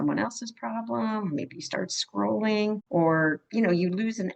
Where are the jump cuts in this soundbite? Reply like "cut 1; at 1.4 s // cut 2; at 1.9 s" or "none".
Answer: cut 1; at 2.8 s // cut 2; at 3.4 s